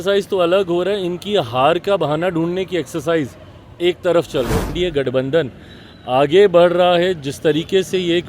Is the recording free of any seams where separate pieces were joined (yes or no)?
no